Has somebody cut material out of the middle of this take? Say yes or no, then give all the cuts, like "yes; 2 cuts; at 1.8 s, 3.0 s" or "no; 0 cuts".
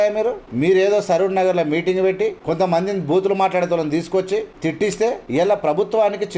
yes; 2 cuts; at 2.4 s, 4.8 s